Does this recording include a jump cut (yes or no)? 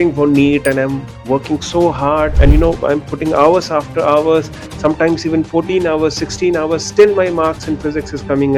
yes